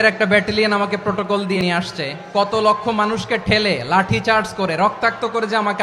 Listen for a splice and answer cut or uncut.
cut